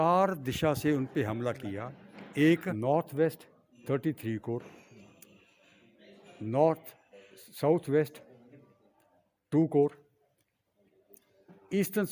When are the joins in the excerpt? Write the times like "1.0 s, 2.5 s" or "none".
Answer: 2.7 s